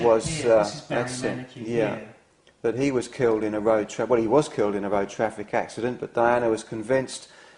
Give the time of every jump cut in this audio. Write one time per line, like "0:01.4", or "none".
0:04.2